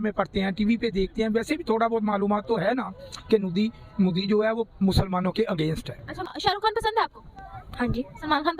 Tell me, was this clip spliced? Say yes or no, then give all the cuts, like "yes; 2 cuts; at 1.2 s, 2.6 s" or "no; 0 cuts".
yes; 1 cut; at 6.1 s